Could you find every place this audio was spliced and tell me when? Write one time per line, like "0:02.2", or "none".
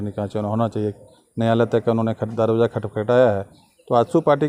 none